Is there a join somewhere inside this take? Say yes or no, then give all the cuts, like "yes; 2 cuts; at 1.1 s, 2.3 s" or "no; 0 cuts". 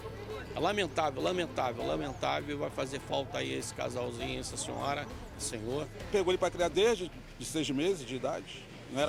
no; 0 cuts